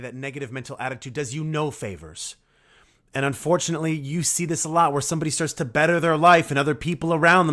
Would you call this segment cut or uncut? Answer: uncut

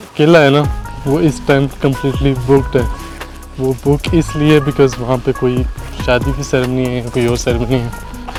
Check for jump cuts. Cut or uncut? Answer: uncut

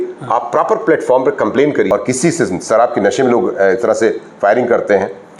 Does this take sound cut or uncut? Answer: cut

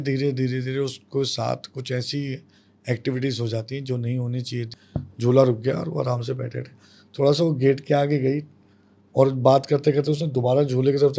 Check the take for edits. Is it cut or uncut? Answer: cut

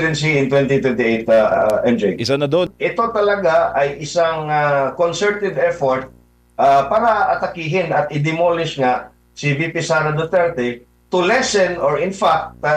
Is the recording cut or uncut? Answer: cut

